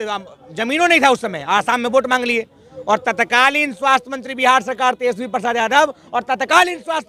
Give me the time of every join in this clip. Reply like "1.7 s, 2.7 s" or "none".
none